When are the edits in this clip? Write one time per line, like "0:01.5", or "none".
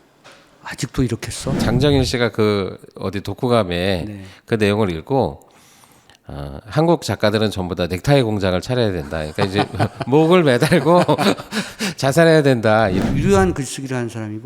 0:01.6
0:13.0